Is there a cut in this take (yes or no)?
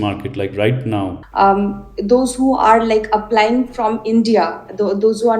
yes